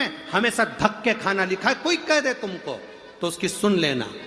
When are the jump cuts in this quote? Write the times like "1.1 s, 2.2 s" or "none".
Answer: none